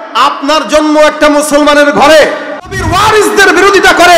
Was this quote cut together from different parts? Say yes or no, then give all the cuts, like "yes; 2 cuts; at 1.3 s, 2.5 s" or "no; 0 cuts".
yes; 1 cut; at 2.8 s